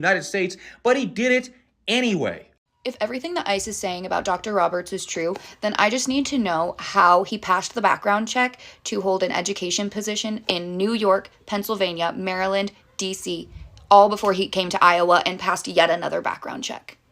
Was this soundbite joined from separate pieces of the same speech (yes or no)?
yes